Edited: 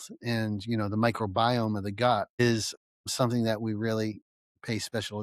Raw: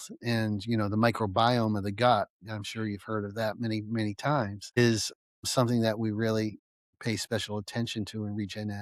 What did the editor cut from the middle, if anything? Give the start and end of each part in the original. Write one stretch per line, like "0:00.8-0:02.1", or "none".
0:02.3-0:04.7